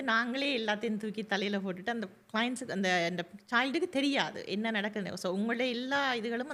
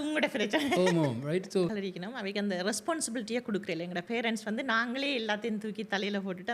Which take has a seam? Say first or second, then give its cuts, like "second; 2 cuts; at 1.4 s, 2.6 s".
second; 1 cut; at 1.7 s